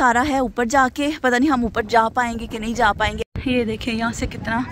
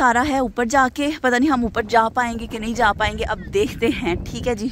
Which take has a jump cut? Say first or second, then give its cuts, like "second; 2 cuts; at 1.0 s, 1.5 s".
first; 1 cut; at 3.3 s